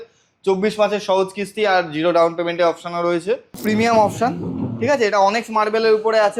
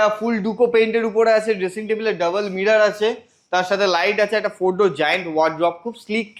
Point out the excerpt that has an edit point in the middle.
first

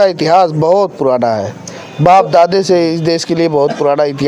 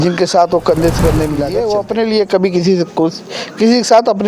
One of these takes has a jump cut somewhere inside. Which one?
second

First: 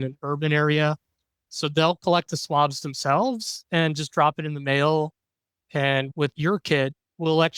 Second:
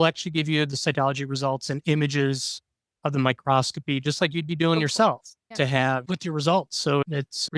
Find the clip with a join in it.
first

